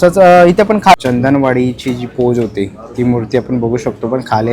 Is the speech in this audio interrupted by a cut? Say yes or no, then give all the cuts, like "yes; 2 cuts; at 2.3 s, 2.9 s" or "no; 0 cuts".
yes; 1 cut; at 1.0 s